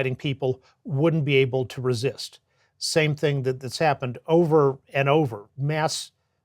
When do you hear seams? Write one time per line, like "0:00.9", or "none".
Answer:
0:05.5